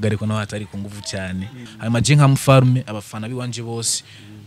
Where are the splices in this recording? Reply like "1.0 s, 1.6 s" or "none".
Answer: 1.6 s